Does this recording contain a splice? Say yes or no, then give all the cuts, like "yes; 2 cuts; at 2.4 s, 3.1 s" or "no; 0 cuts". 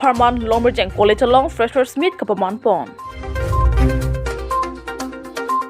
yes; 1 cut; at 3.2 s